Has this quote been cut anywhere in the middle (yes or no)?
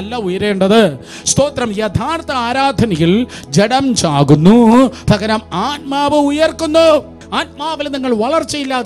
yes